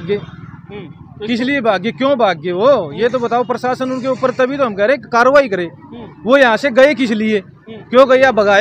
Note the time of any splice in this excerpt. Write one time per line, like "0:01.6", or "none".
none

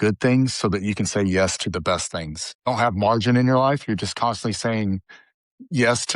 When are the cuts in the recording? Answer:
0:02.7

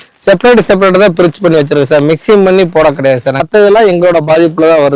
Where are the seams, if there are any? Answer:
0:03.5

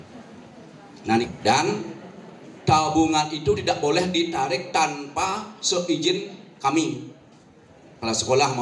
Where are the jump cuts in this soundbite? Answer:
0:01.2

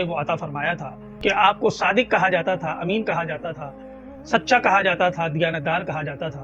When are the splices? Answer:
0:01.0

